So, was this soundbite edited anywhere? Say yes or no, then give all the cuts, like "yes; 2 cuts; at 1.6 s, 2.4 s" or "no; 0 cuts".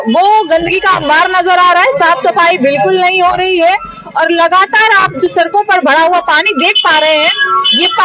no; 0 cuts